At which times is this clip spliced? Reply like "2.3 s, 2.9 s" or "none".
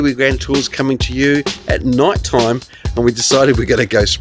2.8 s